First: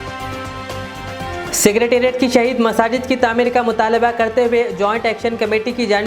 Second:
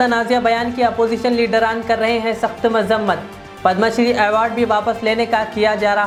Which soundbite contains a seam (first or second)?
first